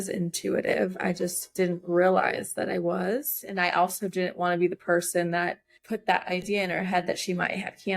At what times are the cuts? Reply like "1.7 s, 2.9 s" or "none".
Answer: 3.4 s

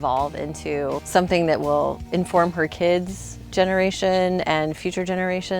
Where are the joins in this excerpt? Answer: 1.0 s, 2.0 s

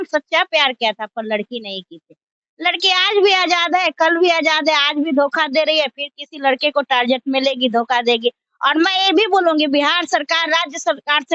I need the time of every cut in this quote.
none

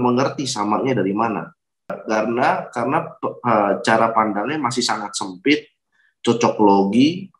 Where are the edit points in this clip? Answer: 2.0 s

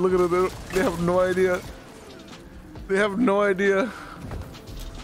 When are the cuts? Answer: none

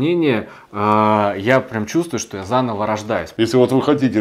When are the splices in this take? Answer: 3.3 s

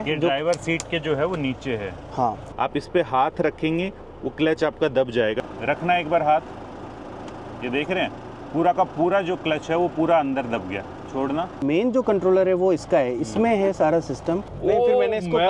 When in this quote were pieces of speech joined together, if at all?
2.5 s, 5.4 s, 11.6 s, 14.5 s

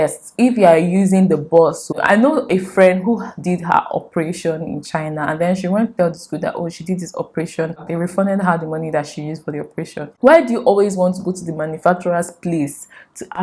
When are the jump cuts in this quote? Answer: 1.9 s, 7.8 s, 10.2 s

